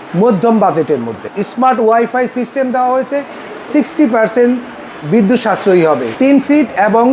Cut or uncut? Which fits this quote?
cut